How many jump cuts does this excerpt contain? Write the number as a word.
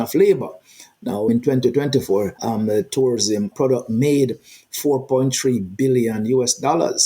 two